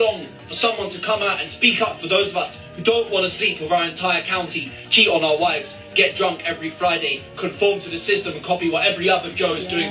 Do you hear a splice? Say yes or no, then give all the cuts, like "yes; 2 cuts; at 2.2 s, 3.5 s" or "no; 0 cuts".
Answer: no; 0 cuts